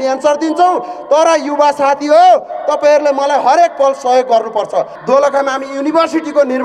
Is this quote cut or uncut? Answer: cut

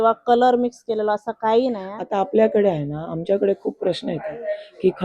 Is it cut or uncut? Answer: cut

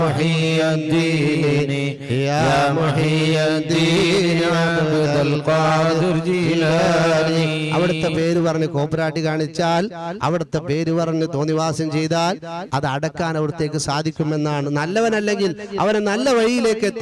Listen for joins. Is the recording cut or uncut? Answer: uncut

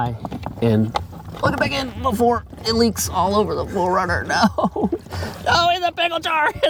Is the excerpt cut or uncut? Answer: uncut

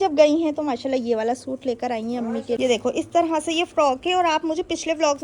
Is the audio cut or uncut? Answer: cut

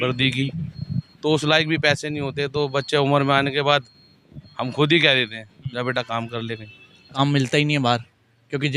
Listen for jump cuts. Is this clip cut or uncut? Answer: cut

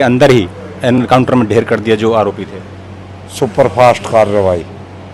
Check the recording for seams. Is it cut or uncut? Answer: uncut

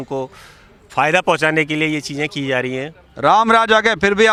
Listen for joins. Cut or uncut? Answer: uncut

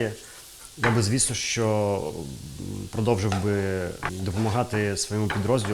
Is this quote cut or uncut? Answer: cut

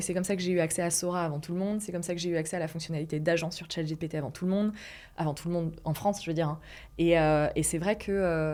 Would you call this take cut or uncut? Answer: uncut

